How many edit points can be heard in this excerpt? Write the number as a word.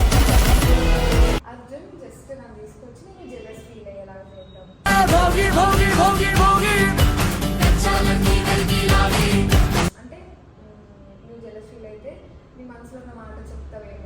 one